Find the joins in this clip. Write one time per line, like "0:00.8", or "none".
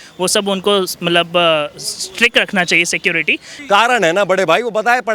0:03.5